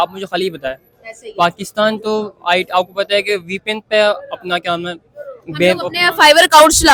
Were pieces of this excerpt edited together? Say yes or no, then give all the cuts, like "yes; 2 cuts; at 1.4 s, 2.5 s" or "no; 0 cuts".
no; 0 cuts